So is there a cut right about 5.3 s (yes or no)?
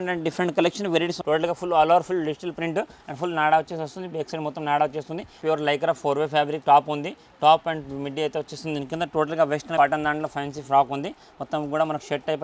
yes